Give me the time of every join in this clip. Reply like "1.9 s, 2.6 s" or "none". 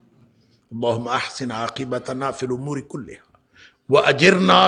none